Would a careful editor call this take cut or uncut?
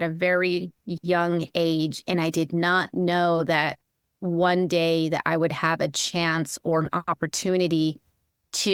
uncut